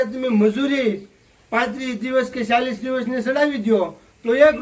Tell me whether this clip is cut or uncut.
uncut